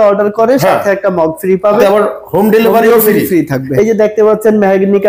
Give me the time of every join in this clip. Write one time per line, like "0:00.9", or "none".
0:01.8
0:03.6